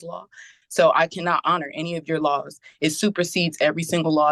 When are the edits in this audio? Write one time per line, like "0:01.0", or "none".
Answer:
none